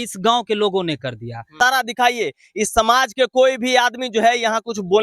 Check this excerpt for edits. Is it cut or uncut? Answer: cut